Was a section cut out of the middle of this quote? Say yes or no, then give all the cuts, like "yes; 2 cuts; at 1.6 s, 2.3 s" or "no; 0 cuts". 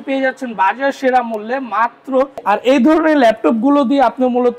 yes; 1 cut; at 2.4 s